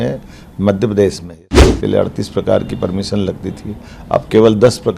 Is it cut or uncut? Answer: cut